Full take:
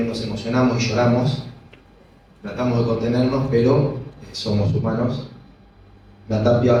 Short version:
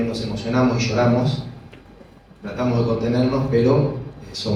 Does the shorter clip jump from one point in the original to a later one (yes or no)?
no